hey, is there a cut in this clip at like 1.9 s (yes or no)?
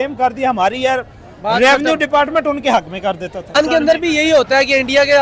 no